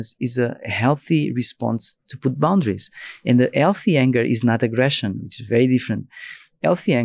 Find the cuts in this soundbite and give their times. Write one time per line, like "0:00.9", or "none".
none

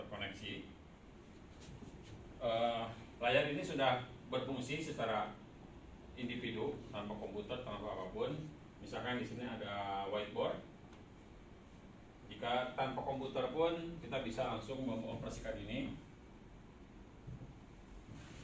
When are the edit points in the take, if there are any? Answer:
0:01.6

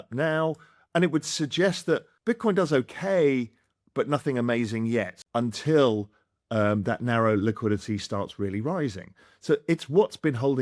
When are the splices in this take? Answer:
0:02.1
0:05.2

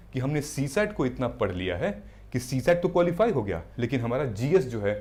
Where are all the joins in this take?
none

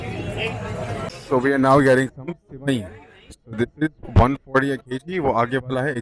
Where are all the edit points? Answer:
none

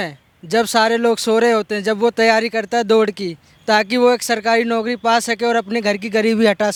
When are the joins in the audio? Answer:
none

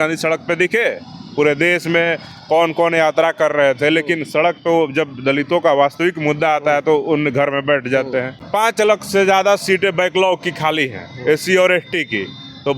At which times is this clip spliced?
0:08.5

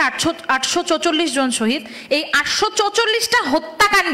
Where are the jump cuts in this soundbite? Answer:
none

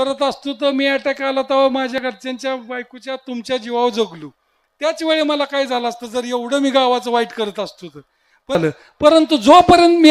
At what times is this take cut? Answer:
0:08.6

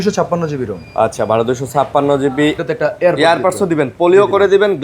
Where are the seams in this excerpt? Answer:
0:02.6

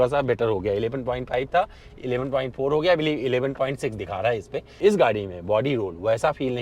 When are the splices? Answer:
0:04.6

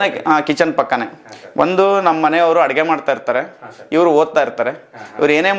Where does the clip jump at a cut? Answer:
none

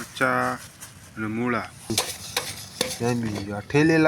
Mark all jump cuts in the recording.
0:01.9

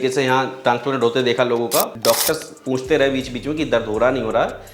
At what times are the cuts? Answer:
0:01.9

